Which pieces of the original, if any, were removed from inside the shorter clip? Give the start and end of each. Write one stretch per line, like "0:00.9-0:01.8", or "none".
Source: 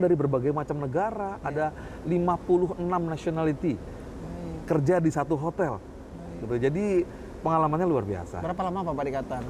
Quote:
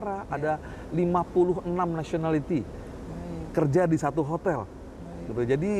none